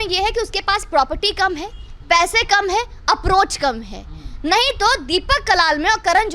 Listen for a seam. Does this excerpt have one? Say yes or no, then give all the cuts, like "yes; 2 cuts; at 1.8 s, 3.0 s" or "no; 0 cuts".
no; 0 cuts